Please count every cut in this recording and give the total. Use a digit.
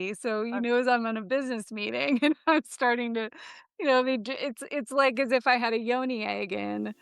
0